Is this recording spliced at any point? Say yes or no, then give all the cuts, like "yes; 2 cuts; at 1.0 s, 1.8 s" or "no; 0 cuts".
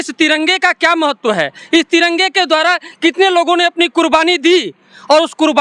no; 0 cuts